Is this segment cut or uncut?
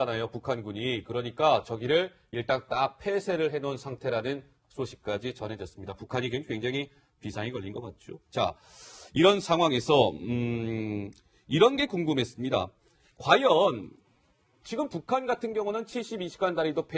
uncut